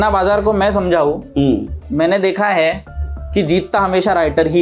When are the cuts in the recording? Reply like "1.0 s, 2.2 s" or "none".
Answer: none